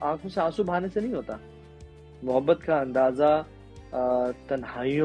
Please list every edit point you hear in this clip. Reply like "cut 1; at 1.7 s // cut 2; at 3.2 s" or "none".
none